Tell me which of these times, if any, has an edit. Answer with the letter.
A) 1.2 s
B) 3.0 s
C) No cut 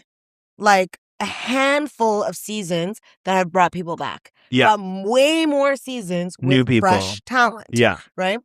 C